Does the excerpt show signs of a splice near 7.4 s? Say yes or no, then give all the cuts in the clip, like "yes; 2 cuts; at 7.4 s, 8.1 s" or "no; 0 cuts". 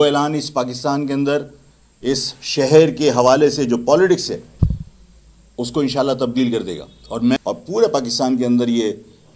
yes; 1 cut; at 7.4 s